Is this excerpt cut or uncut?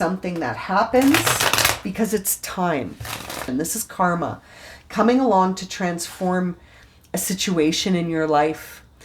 cut